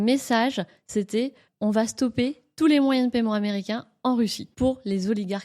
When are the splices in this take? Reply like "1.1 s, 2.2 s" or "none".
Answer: 1.5 s, 4.4 s